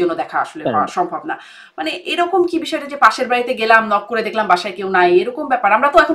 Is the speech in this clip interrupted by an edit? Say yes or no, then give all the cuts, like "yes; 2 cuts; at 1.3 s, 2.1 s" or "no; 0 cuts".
no; 0 cuts